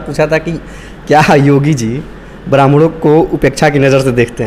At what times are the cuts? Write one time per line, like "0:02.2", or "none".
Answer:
none